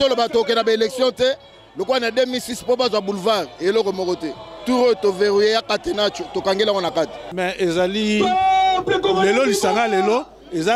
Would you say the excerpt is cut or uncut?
cut